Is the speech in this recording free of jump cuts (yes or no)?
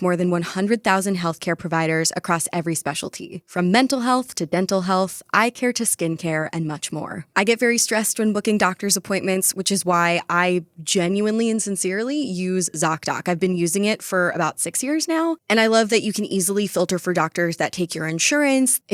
yes